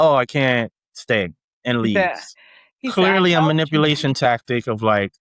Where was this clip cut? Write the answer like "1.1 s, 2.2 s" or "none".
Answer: none

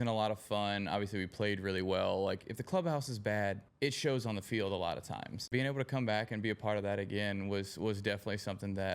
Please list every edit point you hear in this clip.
2.4 s, 3.7 s, 5.5 s

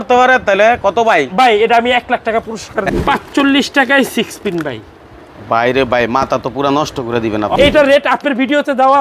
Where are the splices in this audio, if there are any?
2.9 s, 7.6 s

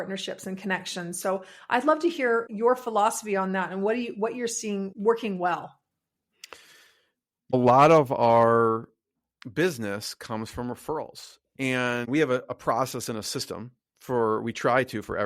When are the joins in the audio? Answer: 2.5 s, 4.9 s, 7.5 s, 12.1 s

